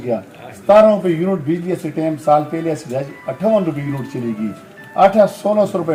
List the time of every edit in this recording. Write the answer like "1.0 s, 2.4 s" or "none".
none